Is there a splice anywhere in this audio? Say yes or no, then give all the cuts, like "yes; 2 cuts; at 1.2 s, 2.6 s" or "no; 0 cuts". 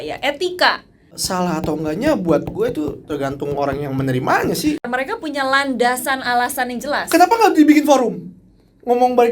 yes; 2 cuts; at 1.2 s, 4.8 s